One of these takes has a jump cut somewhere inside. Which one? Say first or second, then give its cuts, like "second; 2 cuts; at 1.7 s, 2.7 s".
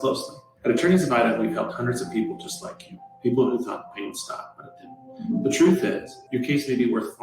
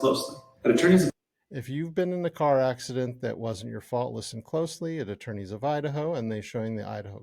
first; 1 cut; at 1.1 s